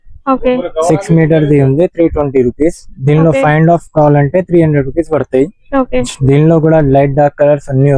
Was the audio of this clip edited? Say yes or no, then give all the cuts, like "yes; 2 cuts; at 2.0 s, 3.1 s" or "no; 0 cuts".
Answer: no; 0 cuts